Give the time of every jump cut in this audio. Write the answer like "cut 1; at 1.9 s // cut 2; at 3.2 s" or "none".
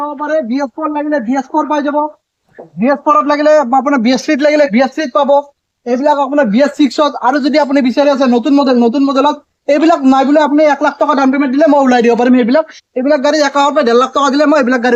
none